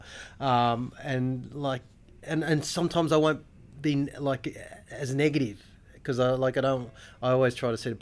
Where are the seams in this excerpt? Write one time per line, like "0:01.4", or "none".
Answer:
none

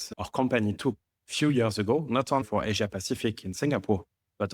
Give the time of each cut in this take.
0:02.4

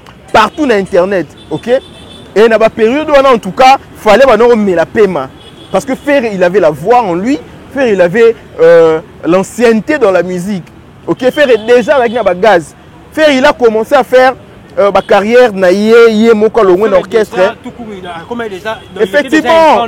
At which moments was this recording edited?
0:01.4

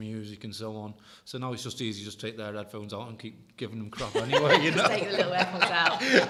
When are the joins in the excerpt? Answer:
none

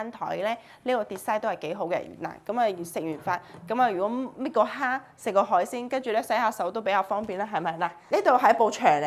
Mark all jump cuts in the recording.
0:07.9

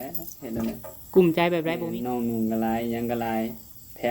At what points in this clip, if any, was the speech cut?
0:01.7

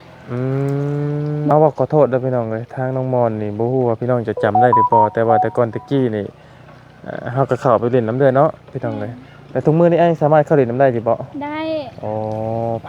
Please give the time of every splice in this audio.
0:01.5

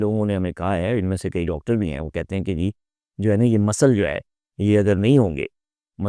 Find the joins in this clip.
none

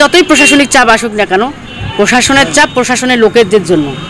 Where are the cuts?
none

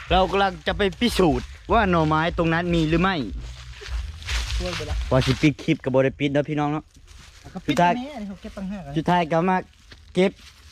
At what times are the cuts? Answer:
0:05.1

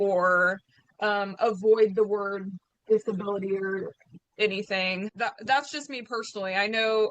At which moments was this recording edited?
0:05.1

